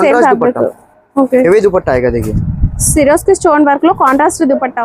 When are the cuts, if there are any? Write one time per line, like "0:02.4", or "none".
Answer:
none